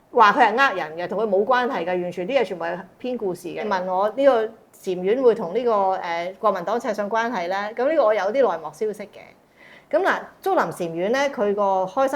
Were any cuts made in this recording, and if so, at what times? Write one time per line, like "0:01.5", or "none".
0:03.7

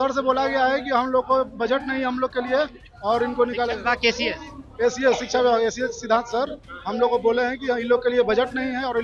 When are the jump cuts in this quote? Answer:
none

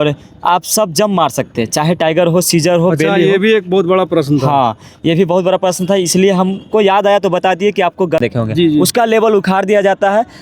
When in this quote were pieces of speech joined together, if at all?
0:08.2

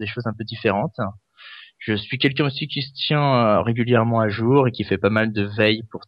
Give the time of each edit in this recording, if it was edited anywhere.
none

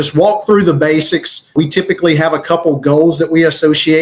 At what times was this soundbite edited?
0:01.5

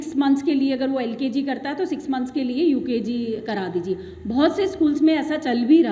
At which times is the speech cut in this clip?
none

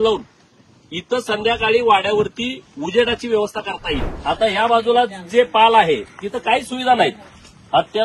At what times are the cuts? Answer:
0:04.1

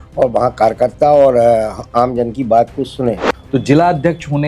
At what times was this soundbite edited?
0:03.3

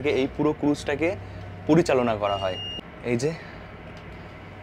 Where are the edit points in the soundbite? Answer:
none

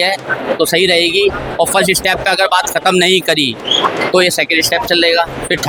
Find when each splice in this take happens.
none

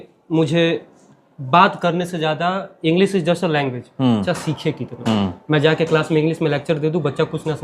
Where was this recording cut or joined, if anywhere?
0:04.2

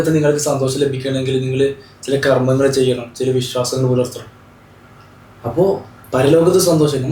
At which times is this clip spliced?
none

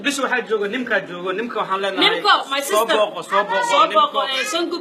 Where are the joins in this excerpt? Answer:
none

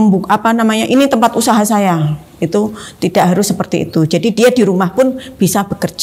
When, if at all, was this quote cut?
none

